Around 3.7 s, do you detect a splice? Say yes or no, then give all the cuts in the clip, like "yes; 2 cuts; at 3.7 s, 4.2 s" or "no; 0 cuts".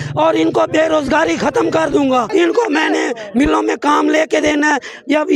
no; 1 cut; at 2.3 s